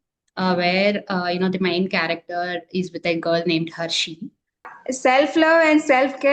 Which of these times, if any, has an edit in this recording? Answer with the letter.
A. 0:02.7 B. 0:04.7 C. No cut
B